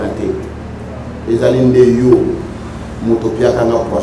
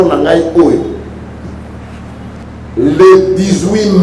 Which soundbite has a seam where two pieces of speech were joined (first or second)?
second